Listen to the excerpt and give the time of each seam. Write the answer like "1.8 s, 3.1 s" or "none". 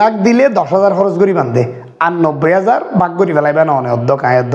none